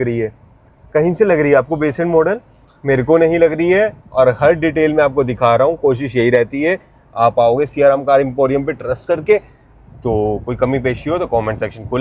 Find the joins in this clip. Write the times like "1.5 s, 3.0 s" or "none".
none